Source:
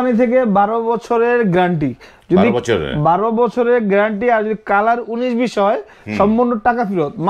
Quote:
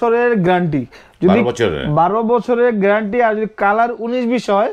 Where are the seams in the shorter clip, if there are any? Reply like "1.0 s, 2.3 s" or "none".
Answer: none